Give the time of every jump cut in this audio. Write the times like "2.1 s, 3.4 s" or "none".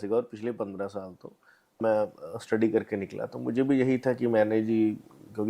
1.8 s